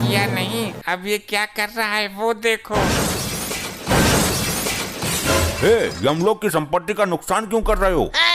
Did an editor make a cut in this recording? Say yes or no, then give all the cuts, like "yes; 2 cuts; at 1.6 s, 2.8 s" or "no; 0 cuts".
no; 0 cuts